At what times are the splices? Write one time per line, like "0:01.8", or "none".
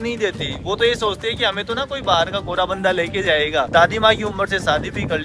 0:03.7